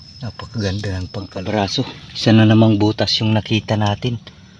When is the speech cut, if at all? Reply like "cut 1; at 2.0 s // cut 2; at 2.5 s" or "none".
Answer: cut 1; at 1.2 s